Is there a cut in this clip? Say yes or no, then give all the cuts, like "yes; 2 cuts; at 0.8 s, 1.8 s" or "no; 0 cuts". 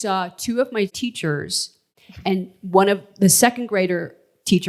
yes; 1 cut; at 1.4 s